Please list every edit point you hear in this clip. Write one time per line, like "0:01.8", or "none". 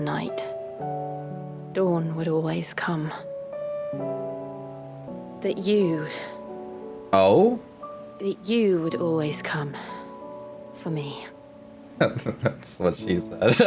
0:01.6
0:05.1